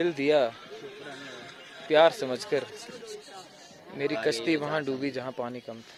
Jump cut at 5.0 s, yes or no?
no